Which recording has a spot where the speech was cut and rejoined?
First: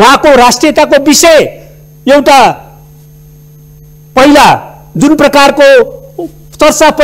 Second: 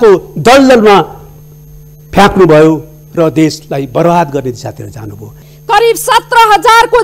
second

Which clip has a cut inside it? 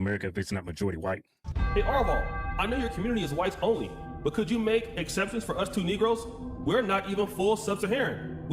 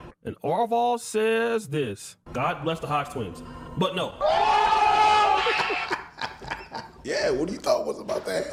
first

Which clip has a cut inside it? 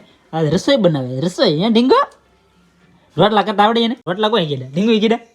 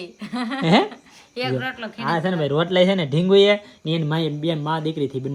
first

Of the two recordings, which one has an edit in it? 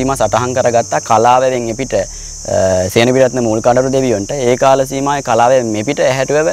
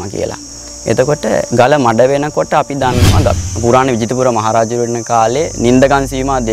second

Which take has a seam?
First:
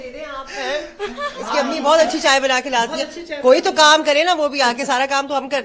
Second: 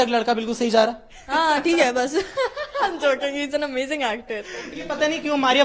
second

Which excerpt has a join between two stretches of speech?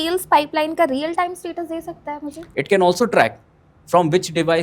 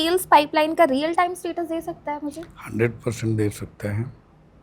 first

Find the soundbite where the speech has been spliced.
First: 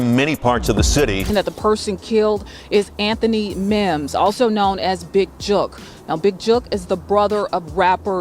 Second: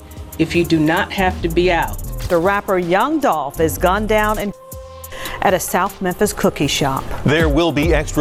first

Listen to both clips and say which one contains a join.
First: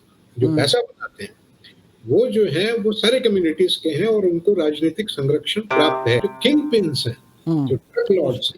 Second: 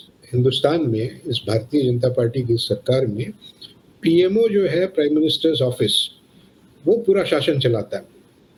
first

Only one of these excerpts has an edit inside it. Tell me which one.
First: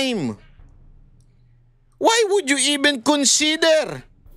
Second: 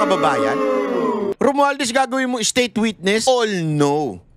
second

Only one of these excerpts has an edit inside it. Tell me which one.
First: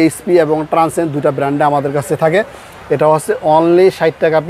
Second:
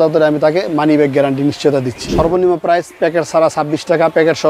second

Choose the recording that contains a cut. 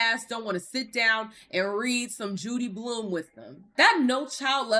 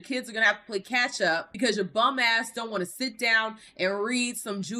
first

